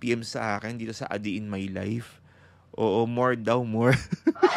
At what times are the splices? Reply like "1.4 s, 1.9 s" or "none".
none